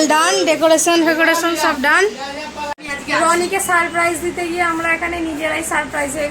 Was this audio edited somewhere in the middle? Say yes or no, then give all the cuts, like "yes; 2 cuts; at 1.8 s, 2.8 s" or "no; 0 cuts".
yes; 1 cut; at 2.8 s